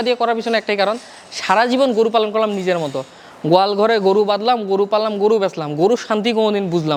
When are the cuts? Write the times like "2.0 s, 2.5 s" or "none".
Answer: none